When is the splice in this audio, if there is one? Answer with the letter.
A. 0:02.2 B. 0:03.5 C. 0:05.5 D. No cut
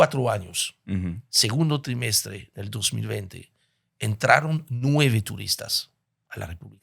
D